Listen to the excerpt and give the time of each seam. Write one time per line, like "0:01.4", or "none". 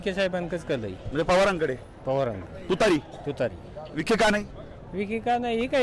none